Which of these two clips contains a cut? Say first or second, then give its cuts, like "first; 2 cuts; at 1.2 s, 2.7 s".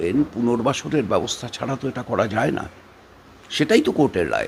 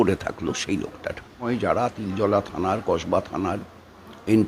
second; 1 cut; at 1.5 s